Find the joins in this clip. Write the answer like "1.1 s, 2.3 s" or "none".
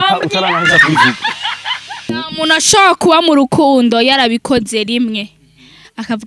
1.9 s